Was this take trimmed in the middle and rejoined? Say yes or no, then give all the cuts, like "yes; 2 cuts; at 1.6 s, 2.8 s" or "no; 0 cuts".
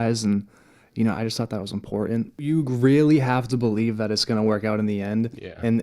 yes; 1 cut; at 2.5 s